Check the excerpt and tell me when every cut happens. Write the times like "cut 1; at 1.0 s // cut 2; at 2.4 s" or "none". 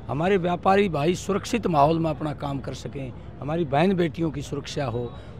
none